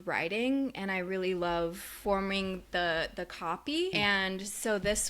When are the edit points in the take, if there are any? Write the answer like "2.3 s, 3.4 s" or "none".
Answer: 1.9 s, 4.0 s